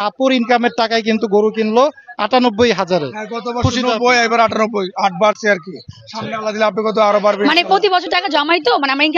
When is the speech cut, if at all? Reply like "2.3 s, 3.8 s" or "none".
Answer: none